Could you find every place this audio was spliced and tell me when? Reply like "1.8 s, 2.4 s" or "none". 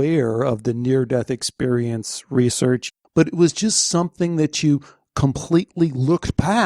2.9 s